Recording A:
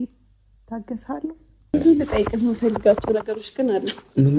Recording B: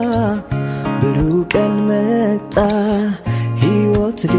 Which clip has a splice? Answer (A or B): A